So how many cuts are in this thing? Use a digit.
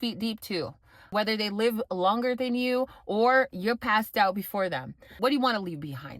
1